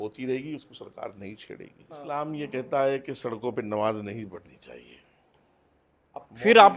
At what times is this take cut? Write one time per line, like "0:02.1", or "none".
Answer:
0:02.1